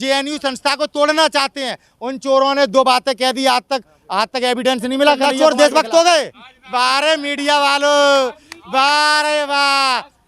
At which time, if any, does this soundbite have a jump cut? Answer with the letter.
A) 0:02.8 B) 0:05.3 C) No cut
B